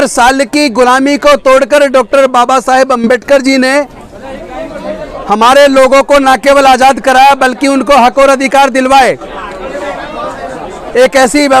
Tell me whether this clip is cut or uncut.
uncut